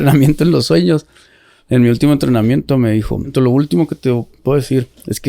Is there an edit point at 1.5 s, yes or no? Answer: no